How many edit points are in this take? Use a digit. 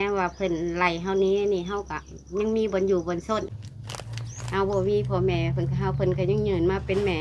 1